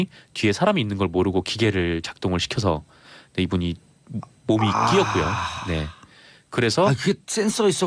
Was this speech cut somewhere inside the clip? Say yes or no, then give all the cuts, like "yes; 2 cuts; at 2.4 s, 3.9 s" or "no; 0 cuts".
yes; 1 cut; at 3.0 s